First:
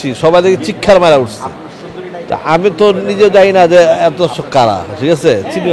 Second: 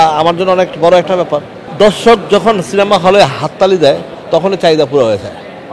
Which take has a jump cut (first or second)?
second